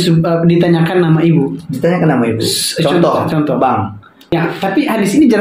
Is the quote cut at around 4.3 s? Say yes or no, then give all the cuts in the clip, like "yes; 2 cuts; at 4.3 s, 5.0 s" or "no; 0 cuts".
yes; 1 cut; at 4.3 s